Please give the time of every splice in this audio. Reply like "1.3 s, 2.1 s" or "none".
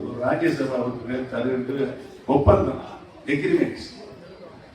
none